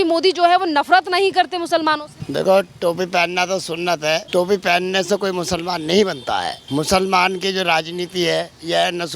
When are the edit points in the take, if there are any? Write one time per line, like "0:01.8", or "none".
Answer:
0:02.1
0:04.2
0:06.6